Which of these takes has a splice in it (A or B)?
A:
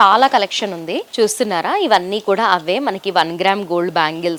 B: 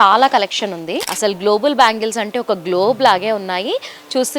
B